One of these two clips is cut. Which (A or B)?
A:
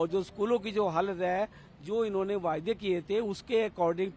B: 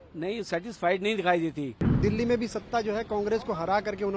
B